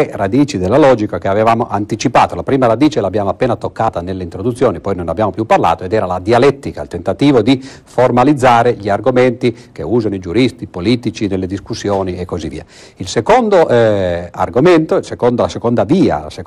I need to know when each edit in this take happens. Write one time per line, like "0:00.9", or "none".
none